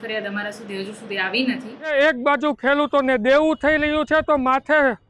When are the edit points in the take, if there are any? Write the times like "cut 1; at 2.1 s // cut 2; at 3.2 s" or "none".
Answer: cut 1; at 1.9 s